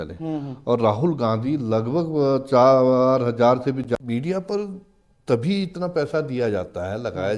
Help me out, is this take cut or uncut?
cut